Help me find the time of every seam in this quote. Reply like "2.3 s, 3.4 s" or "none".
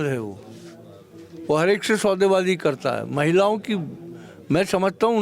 none